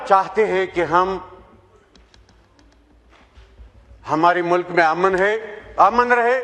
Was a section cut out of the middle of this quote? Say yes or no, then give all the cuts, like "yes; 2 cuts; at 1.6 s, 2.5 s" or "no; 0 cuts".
no; 0 cuts